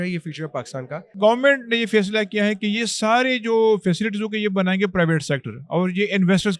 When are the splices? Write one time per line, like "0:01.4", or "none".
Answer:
0:01.1